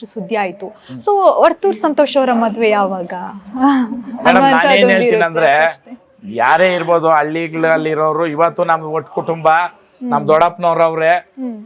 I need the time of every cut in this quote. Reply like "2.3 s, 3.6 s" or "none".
none